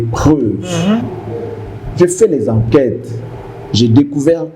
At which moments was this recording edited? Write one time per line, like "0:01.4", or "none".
none